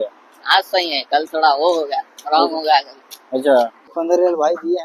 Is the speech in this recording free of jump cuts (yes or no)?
no